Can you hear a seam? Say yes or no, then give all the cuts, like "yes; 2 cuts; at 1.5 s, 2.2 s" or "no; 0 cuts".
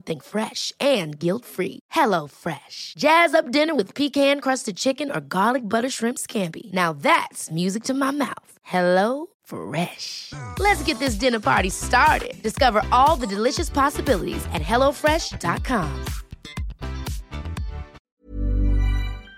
yes; 1 cut; at 18.0 s